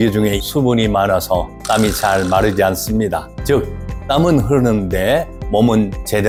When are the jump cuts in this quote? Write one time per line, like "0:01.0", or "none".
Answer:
none